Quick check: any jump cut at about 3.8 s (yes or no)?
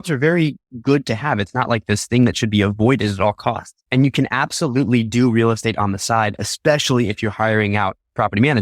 yes